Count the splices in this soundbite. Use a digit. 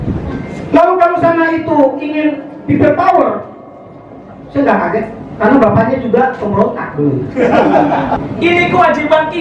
1